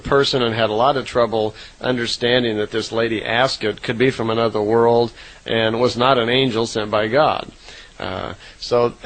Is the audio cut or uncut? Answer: cut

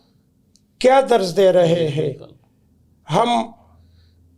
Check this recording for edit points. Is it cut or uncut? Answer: uncut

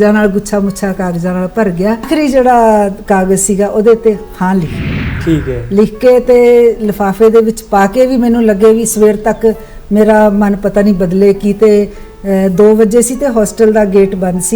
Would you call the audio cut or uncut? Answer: cut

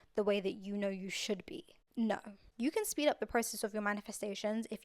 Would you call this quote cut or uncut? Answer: cut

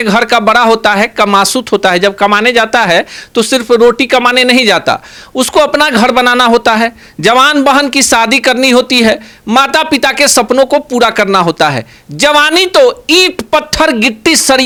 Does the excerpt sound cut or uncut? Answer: uncut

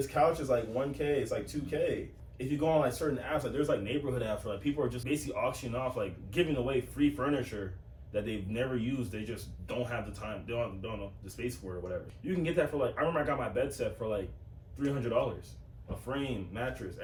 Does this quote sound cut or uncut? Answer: uncut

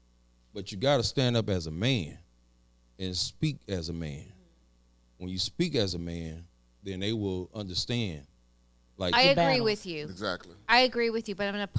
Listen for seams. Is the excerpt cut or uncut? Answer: cut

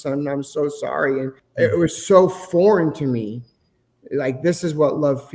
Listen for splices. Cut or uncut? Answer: cut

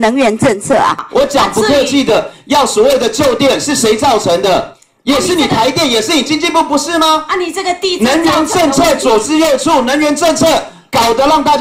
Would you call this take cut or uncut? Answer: cut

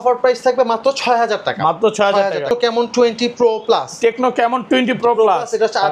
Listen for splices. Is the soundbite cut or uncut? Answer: cut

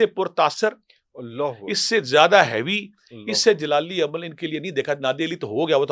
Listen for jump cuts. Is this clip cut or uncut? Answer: uncut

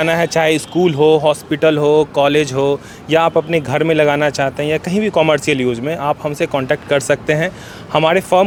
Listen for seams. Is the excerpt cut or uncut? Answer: uncut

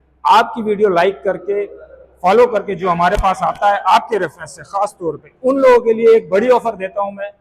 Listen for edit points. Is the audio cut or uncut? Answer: uncut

